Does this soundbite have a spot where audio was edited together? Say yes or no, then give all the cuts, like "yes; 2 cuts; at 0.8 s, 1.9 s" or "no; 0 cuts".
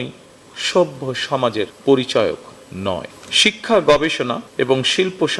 yes; 2 cuts; at 1.7 s, 3.2 s